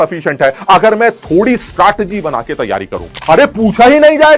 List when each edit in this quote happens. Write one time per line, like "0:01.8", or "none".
0:03.2